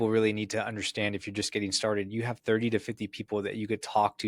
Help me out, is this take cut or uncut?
uncut